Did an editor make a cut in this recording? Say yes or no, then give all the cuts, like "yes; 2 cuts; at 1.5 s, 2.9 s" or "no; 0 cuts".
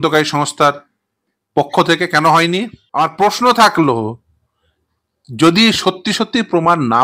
yes; 1 cut; at 2.8 s